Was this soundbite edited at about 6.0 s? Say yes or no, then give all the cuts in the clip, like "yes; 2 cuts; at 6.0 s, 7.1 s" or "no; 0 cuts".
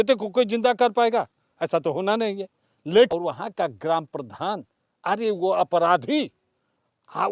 no; 1 cut; at 3.1 s